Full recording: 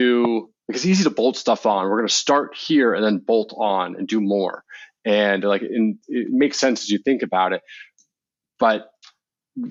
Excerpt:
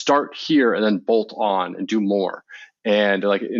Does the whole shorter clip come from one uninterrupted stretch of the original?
yes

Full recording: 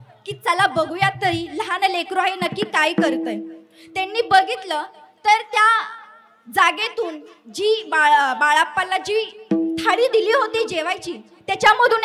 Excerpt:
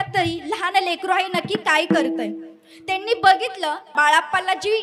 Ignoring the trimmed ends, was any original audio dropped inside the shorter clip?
yes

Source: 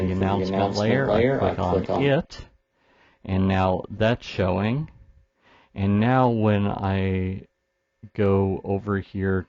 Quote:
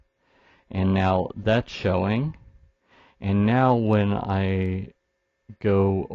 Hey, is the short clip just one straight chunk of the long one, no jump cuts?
yes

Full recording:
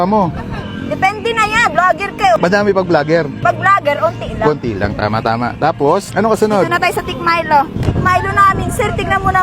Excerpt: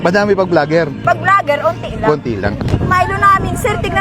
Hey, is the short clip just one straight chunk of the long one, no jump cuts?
no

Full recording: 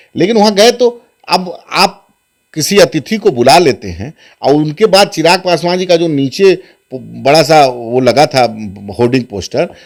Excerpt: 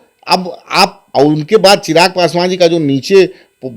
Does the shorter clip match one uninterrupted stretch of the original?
no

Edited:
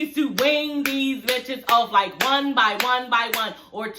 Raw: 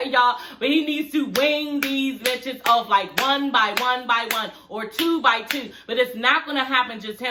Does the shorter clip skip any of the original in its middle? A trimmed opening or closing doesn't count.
no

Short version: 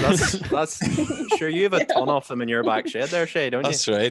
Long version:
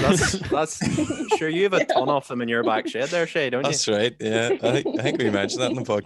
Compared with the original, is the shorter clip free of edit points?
yes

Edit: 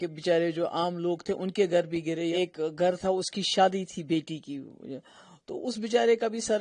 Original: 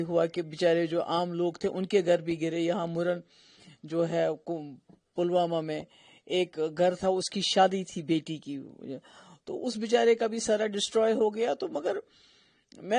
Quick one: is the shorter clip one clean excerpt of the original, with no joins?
no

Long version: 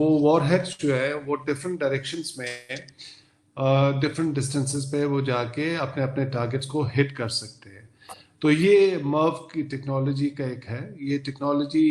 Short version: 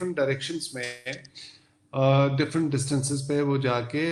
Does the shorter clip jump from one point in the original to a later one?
no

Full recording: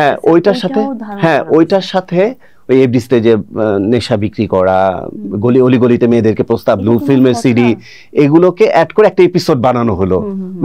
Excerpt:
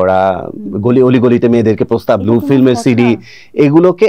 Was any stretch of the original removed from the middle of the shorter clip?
no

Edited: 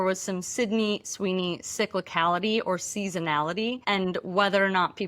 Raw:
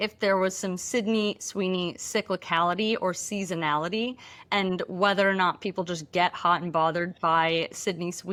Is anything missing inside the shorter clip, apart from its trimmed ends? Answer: yes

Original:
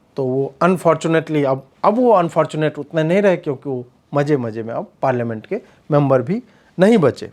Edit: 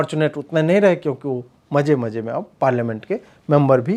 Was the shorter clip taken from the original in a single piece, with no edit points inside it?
yes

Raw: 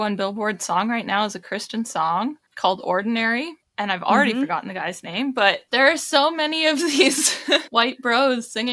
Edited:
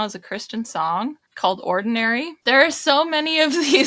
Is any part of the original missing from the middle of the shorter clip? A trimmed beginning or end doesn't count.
yes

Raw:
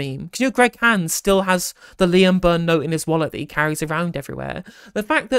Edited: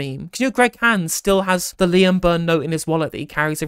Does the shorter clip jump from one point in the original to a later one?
yes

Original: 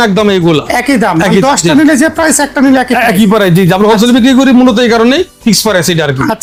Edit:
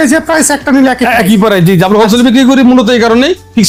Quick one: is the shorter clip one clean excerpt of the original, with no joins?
yes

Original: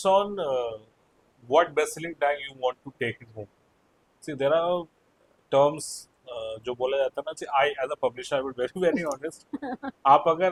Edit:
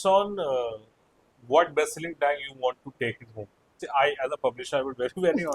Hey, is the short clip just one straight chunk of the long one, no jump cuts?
no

